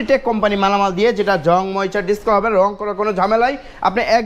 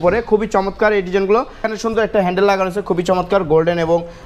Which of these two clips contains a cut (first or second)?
second